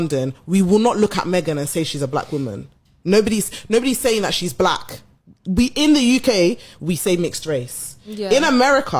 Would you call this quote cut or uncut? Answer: uncut